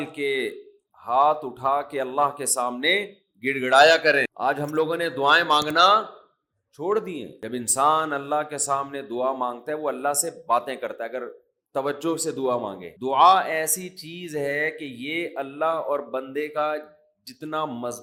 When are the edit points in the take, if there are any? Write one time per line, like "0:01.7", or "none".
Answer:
none